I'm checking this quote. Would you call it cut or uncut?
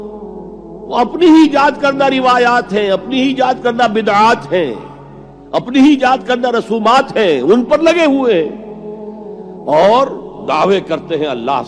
uncut